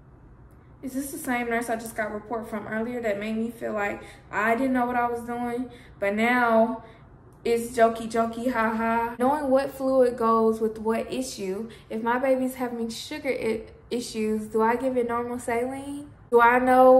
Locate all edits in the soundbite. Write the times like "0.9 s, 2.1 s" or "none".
9.2 s, 16.3 s